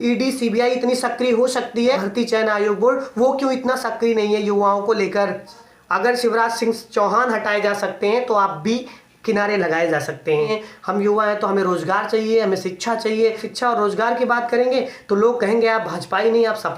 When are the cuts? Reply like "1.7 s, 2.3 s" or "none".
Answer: 2.0 s, 5.6 s, 10.6 s, 13.5 s